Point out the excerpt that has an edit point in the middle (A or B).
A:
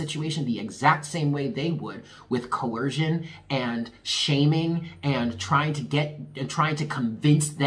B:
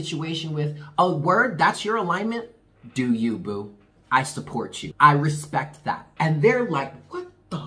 B